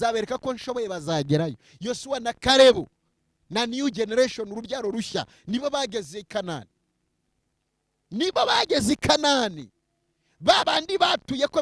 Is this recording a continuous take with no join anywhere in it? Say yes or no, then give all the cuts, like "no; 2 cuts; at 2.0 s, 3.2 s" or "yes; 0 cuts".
yes; 0 cuts